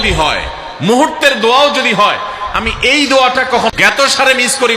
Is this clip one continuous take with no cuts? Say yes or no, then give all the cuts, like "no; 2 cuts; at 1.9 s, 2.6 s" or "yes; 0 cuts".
no; 1 cut; at 3.7 s